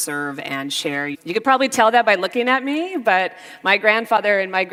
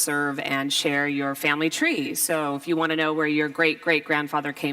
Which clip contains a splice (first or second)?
second